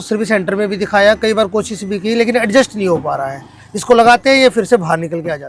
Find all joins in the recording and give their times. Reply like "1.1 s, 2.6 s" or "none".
none